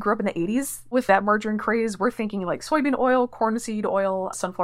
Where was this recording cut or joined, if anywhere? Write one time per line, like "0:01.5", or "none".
0:01.0